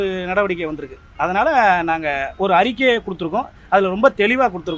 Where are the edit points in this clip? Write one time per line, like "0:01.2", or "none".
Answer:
none